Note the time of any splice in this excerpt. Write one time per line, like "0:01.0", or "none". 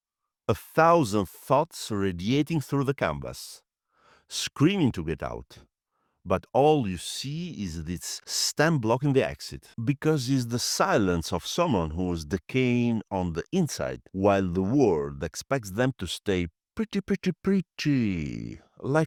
none